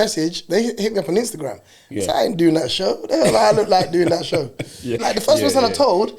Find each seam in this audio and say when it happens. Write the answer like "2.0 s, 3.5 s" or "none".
5.0 s

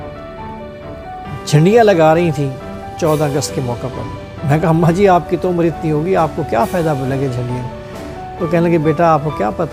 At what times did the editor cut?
none

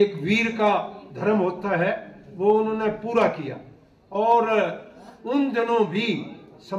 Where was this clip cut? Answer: none

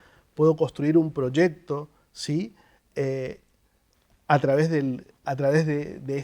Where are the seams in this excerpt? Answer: none

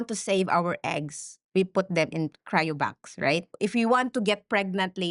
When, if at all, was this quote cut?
3.6 s

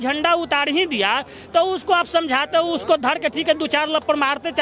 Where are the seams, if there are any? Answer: none

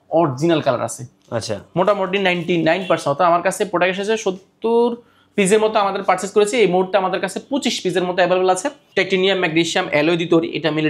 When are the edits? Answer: 8.8 s

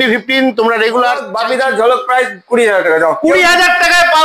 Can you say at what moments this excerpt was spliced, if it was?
1.3 s

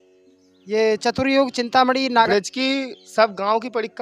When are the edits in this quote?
2.3 s

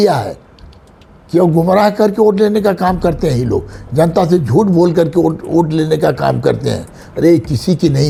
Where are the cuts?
none

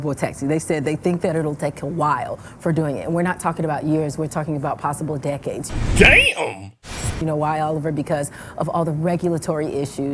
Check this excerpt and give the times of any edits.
none

